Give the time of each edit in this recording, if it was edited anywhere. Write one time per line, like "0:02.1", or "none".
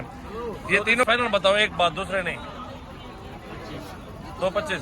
0:01.1